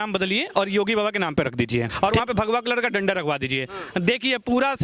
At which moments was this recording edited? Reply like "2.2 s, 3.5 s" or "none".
1.9 s

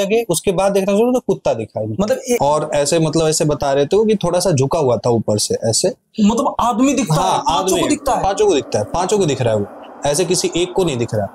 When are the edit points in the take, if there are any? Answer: 2.4 s

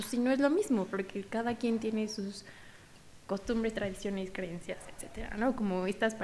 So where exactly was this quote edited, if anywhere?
none

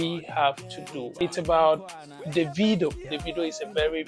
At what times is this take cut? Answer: 1.1 s, 3.1 s

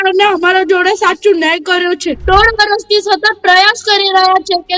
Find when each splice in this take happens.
2.2 s

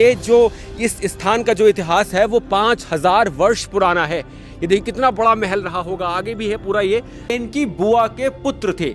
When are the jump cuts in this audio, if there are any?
7.3 s

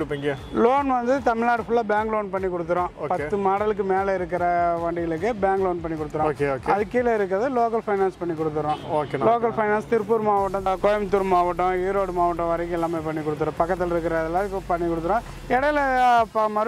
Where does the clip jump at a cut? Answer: none

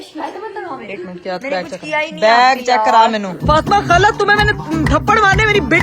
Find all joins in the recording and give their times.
3.3 s

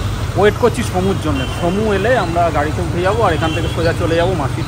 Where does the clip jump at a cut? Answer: none

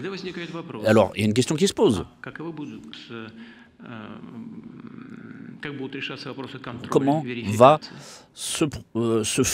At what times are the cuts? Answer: none

